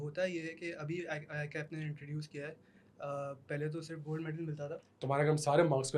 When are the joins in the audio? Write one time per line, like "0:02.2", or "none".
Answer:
0:05.0